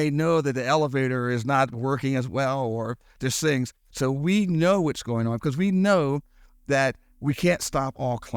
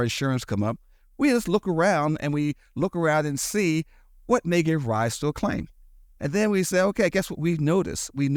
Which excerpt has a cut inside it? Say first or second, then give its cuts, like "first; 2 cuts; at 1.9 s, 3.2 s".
first; 1 cut; at 3.8 s